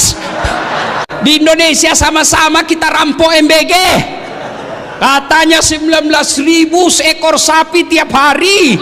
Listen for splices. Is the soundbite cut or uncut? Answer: cut